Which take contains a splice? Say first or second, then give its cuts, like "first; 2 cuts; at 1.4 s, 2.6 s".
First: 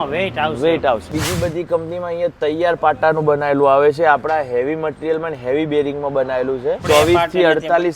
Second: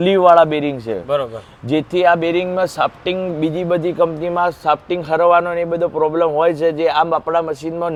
first; 2 cuts; at 1.0 s, 6.8 s